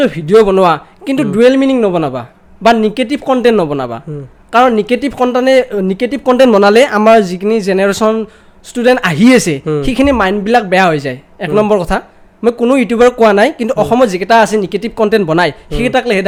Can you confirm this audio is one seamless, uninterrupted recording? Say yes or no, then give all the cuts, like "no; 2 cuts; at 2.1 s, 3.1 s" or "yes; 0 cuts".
yes; 0 cuts